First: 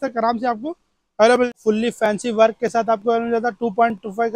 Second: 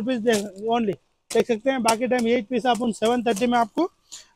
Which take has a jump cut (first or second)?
first